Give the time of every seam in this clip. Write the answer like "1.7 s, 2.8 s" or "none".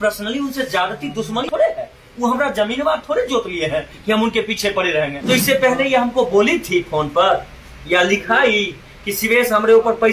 1.5 s, 5.2 s